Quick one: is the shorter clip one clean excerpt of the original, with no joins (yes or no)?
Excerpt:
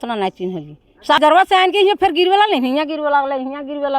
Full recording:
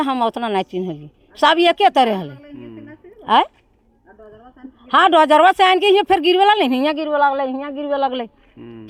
no